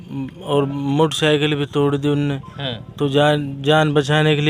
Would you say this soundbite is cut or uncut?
uncut